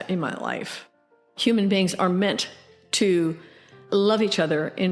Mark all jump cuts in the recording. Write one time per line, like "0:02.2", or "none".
0:01.3